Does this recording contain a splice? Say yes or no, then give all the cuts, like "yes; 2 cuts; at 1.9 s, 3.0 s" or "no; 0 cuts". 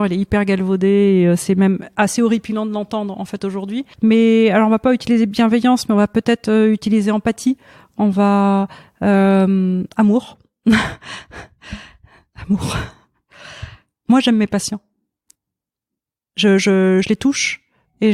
yes; 1 cut; at 3.9 s